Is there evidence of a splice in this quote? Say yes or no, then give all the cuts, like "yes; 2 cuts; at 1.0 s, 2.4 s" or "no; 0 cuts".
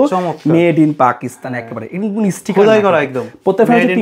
no; 0 cuts